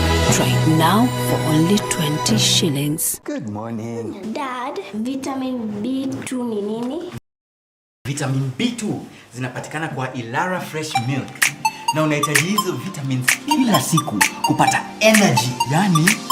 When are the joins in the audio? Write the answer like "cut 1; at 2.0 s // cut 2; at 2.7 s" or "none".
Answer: none